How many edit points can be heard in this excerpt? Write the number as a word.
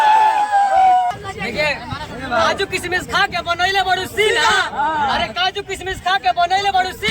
one